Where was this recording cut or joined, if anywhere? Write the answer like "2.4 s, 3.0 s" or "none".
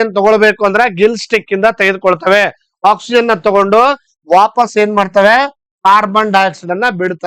none